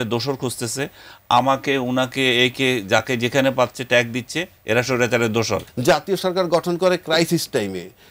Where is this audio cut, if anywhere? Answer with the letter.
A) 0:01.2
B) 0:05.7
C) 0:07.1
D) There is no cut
B